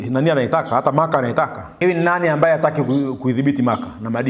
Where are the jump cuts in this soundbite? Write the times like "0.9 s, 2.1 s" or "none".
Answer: 1.6 s